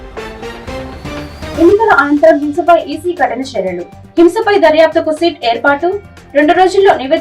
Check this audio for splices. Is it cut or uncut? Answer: cut